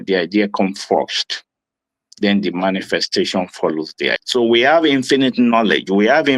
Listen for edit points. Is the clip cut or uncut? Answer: cut